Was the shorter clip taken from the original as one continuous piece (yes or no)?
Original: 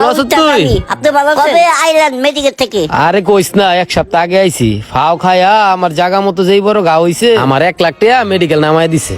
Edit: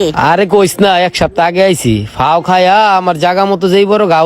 yes